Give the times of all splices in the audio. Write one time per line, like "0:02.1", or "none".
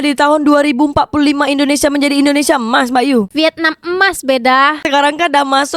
0:04.8